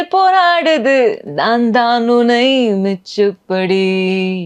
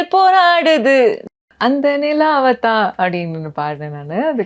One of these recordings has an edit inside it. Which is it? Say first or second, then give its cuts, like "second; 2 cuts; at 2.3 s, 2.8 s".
second; 1 cut; at 1.4 s